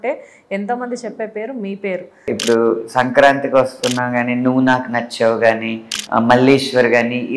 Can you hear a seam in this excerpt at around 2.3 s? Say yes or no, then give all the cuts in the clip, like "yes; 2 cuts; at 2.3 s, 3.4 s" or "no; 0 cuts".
yes; 1 cut; at 2.3 s